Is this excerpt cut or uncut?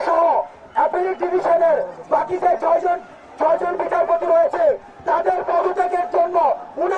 uncut